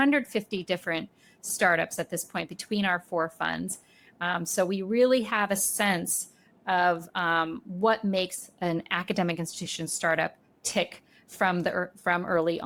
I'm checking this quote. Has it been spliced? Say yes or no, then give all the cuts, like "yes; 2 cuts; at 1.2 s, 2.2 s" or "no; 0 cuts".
no; 0 cuts